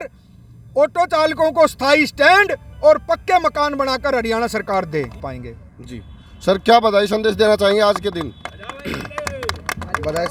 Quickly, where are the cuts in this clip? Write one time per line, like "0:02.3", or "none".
none